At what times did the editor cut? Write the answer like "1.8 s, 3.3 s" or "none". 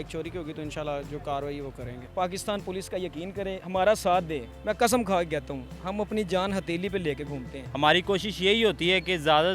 2.0 s, 7.6 s